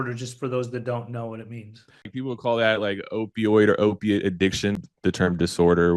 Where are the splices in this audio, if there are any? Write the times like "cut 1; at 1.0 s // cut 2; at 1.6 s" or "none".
cut 1; at 2.1 s // cut 2; at 4.8 s